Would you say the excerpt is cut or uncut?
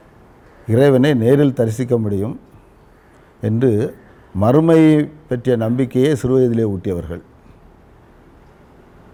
uncut